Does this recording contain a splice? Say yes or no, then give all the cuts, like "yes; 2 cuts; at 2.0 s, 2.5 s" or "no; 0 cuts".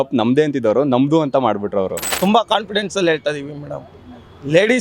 yes; 1 cut; at 2.0 s